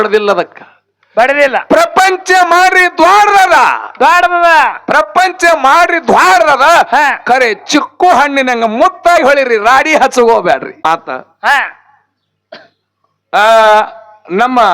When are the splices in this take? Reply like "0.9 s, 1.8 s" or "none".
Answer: 10.8 s